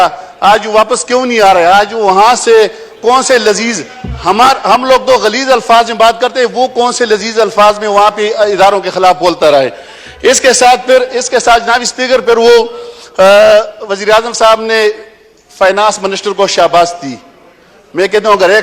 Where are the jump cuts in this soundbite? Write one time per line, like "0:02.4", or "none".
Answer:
none